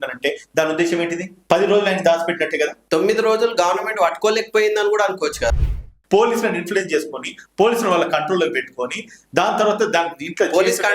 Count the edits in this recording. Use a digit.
3